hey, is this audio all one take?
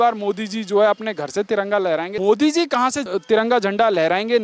no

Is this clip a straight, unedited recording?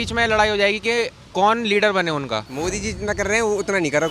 no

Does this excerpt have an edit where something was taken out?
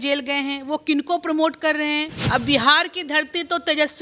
yes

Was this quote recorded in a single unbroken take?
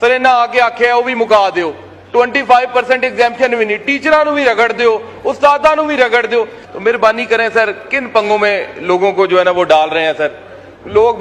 no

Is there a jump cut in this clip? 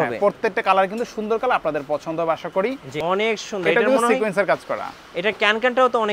yes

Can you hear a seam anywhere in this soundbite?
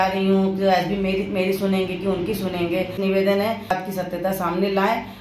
yes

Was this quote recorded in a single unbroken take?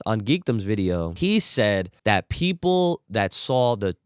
no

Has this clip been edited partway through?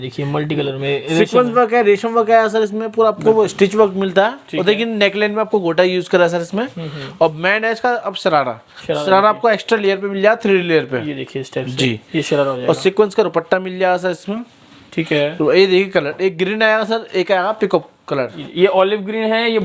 no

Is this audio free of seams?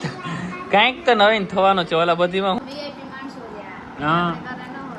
no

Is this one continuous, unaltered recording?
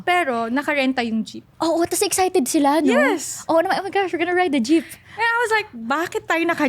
no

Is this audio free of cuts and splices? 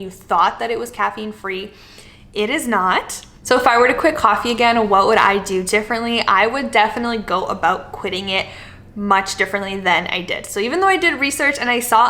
yes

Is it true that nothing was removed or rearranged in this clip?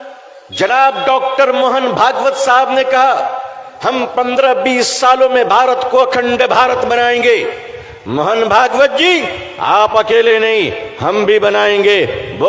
yes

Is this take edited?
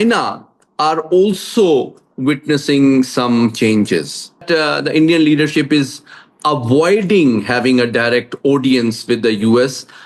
yes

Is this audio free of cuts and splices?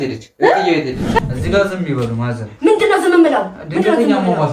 no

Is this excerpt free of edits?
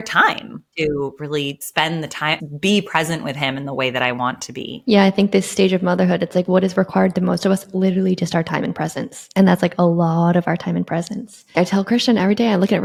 yes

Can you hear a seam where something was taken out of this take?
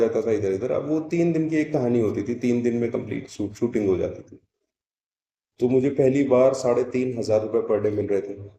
no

